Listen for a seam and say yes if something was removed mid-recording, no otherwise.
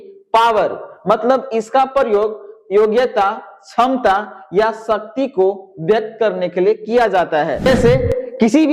yes